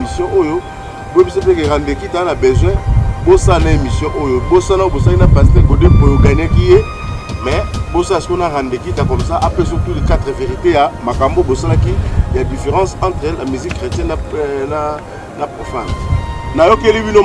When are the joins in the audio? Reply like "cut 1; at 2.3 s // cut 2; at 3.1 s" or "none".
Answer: cut 1; at 15.9 s